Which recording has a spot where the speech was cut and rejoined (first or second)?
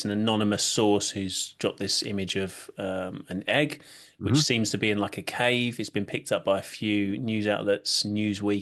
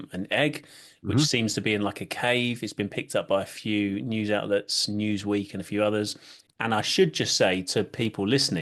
second